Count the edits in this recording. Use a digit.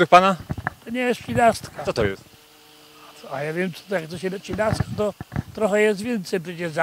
0